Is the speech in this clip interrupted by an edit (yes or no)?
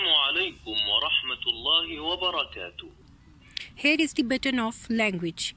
no